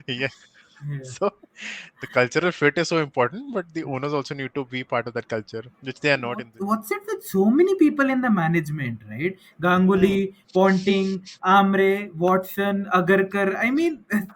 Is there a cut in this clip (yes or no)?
yes